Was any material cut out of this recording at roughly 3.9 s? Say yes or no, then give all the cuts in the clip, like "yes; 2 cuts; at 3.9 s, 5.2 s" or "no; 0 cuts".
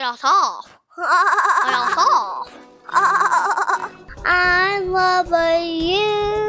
yes; 1 cut; at 3.9 s